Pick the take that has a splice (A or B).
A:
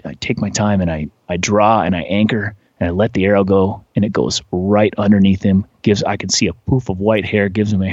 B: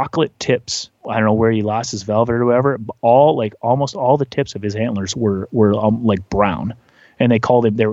B